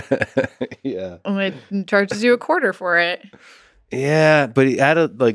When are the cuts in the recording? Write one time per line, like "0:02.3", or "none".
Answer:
none